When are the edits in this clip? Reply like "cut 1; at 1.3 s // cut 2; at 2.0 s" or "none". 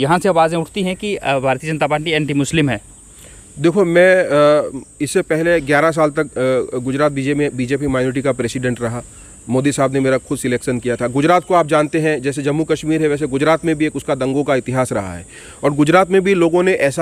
none